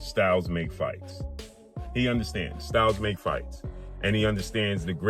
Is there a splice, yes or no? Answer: no